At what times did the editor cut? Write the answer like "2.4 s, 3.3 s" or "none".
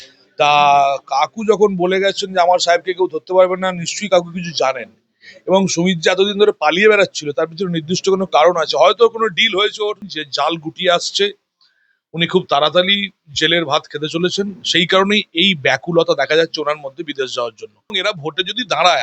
10.0 s, 18.0 s